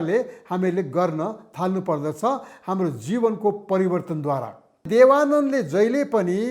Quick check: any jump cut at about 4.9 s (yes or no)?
yes